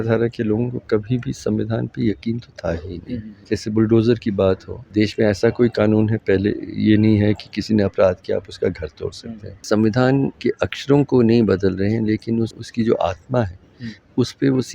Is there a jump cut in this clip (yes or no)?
yes